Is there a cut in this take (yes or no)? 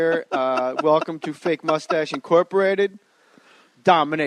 no